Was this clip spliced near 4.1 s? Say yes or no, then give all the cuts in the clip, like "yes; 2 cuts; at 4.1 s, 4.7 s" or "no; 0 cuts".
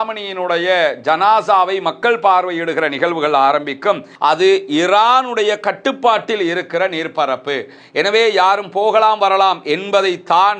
yes; 1 cut; at 4.1 s